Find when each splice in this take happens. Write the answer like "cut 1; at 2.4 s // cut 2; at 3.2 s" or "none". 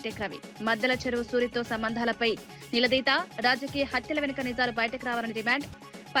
none